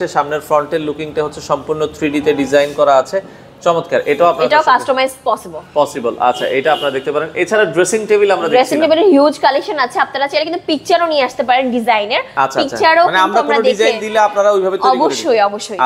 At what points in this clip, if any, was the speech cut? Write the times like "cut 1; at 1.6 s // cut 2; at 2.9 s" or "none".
none